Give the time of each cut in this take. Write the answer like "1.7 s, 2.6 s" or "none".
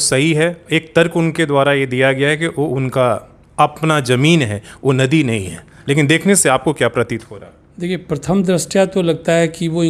none